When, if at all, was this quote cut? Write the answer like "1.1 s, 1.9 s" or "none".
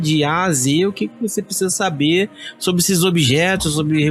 none